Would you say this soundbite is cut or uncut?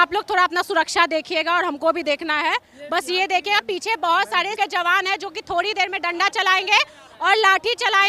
cut